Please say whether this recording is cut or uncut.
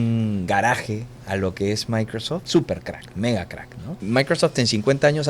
cut